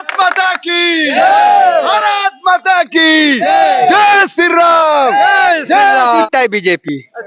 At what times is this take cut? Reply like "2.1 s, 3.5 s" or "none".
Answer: 6.3 s

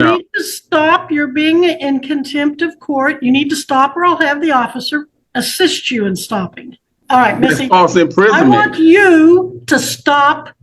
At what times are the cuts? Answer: 5.2 s, 6.9 s

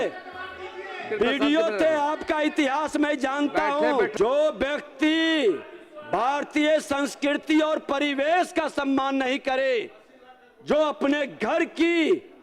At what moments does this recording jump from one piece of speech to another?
4.1 s

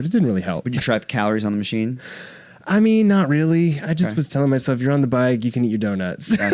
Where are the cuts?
none

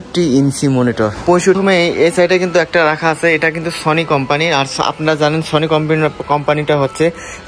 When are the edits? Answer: 1.6 s

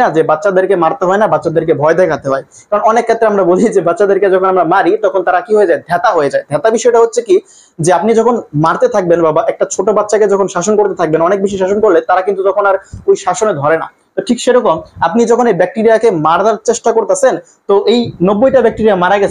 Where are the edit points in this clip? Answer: none

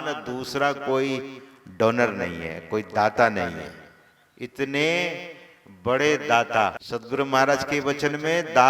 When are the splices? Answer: 6.8 s

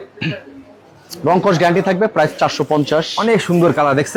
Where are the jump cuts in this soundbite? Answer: none

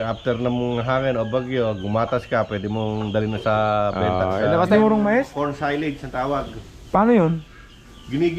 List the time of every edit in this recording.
4.7 s

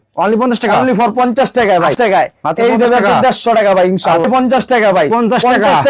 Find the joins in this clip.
1.9 s, 4.2 s

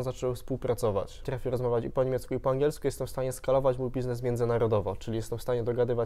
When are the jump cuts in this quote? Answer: 1.3 s

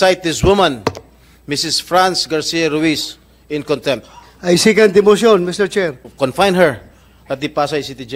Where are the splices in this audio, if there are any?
6.0 s

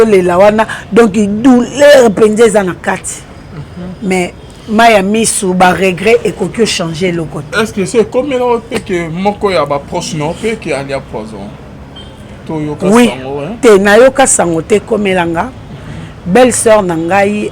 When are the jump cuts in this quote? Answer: none

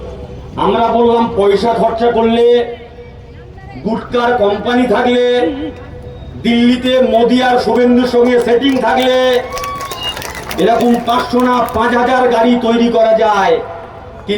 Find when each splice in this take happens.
none

